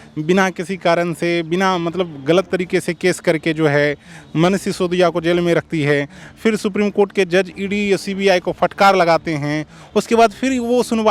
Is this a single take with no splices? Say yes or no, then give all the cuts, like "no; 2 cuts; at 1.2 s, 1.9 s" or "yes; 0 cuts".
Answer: yes; 0 cuts